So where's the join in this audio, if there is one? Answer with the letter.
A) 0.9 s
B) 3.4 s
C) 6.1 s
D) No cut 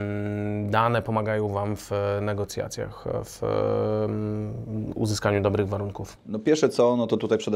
D